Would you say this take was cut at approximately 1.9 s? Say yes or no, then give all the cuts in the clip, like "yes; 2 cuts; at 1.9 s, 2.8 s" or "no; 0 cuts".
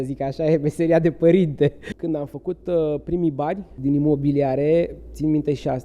yes; 2 cuts; at 1.9 s, 3.7 s